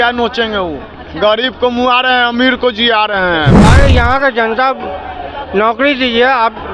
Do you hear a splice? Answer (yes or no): yes